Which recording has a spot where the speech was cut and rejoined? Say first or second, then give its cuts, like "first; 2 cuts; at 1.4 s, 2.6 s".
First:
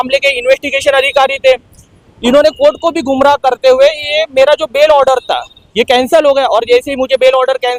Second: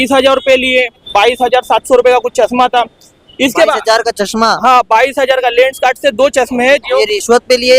second; 1 cut; at 1.0 s